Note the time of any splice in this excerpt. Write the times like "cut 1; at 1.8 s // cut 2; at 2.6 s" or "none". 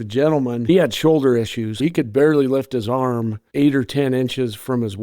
cut 1; at 0.7 s // cut 2; at 1.8 s // cut 3; at 3.4 s

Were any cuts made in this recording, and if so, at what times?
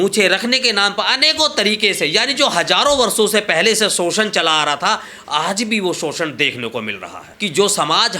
cut 1; at 7.3 s

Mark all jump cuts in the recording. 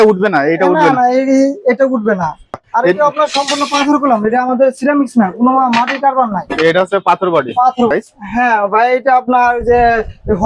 cut 1; at 2.6 s // cut 2; at 7.9 s

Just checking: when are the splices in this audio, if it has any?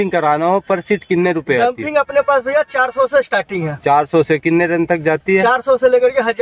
none

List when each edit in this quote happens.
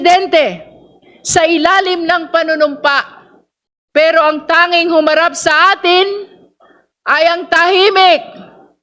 none

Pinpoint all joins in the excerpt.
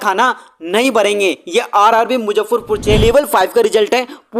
cut 1; at 3.0 s

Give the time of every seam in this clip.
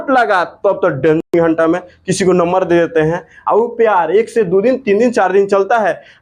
cut 1; at 1.3 s

